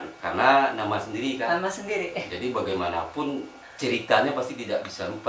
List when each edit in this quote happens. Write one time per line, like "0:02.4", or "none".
0:03.6

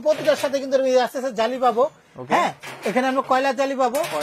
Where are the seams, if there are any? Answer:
none

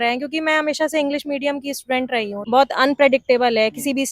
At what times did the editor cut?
0:02.4

